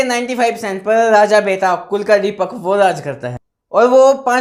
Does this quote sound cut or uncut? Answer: uncut